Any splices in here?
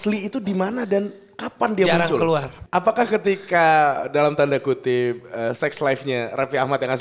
yes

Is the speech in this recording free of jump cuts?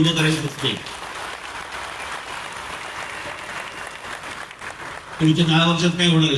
yes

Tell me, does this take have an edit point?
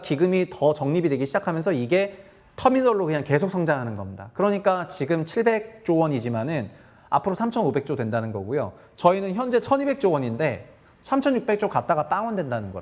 no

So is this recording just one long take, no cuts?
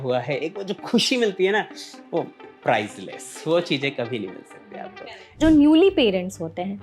no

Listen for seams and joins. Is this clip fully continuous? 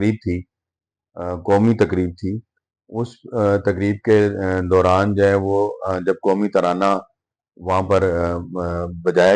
yes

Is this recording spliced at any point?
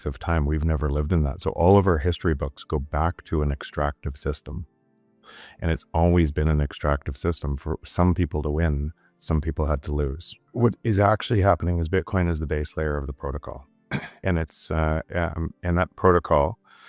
yes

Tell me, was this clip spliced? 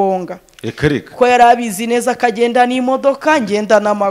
no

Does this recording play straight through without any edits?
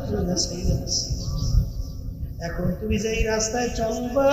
yes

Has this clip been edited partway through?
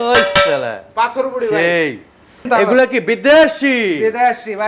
yes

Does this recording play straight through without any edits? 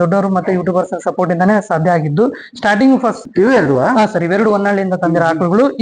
no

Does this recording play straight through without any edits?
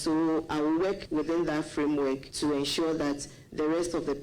no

